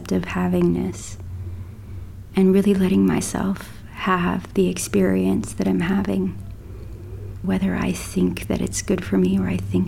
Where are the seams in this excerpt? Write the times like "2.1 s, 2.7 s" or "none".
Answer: 7.5 s